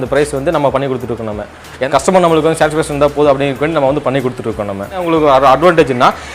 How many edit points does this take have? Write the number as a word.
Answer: two